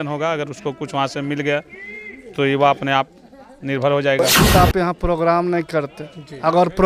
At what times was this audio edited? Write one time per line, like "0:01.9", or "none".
0:04.5